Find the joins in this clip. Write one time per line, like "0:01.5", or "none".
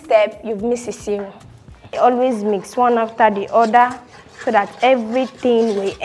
0:02.0

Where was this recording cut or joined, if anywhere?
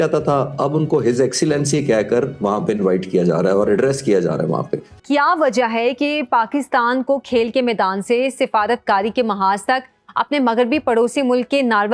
0:04.9

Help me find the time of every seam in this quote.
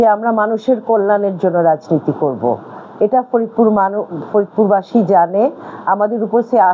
none

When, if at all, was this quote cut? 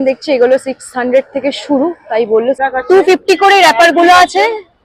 0:02.6

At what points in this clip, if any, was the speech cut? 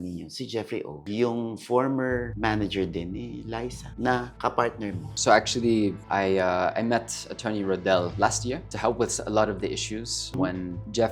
none

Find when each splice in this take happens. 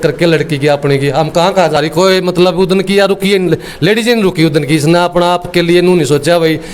0:01.8

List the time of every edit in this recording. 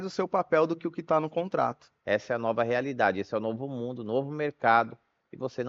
0:01.9

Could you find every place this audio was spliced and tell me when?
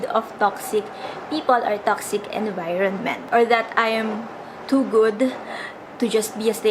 0:03.3

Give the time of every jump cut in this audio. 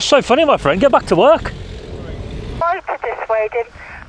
0:02.6

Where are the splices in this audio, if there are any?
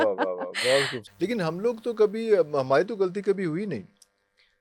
0:01.0

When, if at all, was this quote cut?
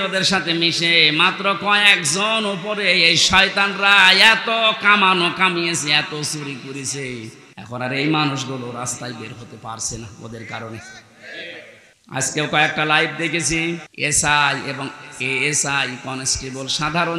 0:07.5
0:11.9
0:13.9

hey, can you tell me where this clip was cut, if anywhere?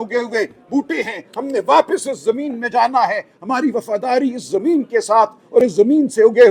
none

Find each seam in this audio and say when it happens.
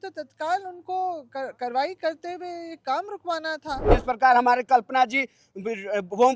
0:03.9

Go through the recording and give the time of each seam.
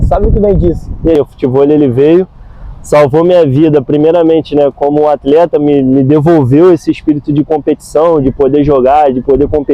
0:01.2

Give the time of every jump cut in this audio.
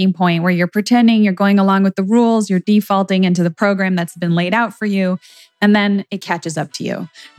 none

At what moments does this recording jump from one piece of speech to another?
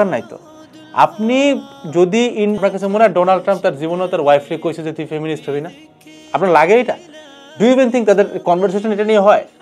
0:02.6

